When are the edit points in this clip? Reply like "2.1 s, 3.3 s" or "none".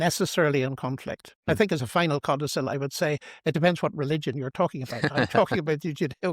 1.5 s